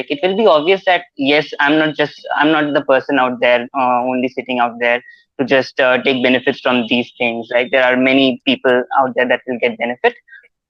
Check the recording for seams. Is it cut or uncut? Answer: uncut